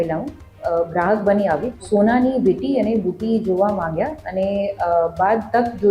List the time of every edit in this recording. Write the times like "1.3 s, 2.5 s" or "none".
1.7 s